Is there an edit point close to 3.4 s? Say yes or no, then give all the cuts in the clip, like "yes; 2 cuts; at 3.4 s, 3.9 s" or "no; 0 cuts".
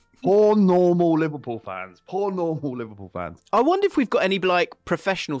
yes; 1 cut; at 3.4 s